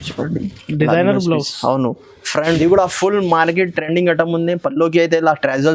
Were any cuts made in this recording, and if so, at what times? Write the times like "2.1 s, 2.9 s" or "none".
2.6 s